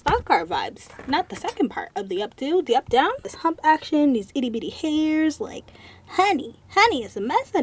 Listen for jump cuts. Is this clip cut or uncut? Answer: cut